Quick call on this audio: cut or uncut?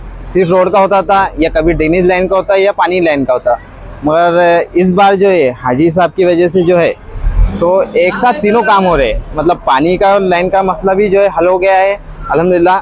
uncut